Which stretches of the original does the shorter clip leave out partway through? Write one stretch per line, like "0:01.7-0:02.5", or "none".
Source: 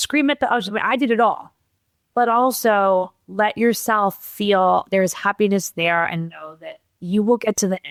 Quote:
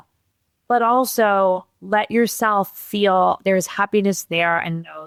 none